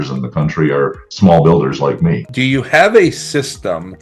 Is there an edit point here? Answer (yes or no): yes